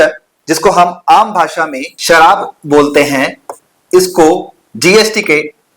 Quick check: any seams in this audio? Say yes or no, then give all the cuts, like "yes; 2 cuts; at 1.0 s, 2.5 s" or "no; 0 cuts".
yes; 1 cut; at 1.9 s